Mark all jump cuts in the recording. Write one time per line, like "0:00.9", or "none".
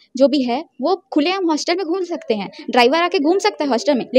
none

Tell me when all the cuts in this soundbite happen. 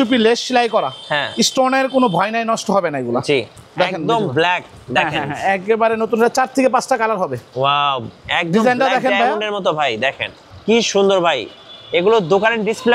0:03.6

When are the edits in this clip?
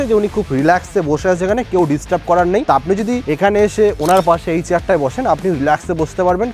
none

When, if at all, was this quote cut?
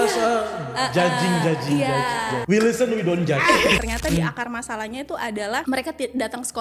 0:02.3
0:03.8
0:05.6

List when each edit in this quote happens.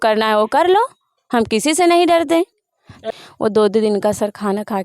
0:03.1

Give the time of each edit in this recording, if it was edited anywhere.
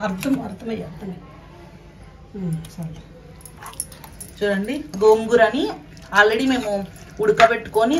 none

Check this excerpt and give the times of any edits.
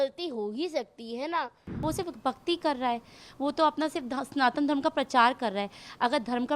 0:01.8

